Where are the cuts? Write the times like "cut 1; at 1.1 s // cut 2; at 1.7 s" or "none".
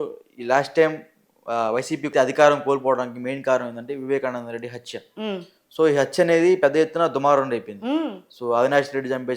cut 1; at 2.1 s